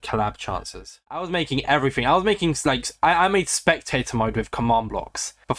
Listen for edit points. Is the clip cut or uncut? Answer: cut